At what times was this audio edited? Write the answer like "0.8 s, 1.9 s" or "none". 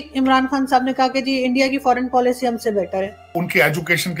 3.2 s